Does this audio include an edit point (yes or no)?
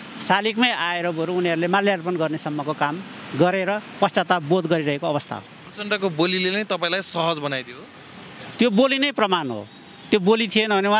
yes